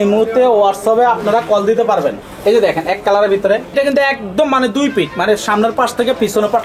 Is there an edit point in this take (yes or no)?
yes